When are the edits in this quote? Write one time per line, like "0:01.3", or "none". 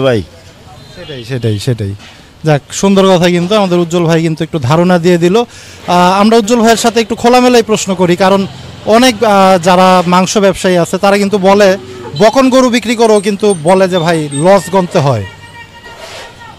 none